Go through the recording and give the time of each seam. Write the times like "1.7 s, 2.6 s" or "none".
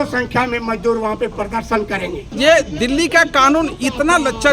2.2 s